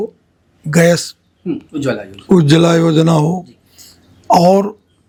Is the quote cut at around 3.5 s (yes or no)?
no